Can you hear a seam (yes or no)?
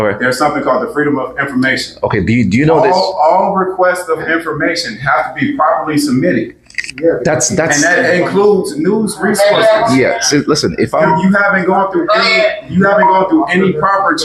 no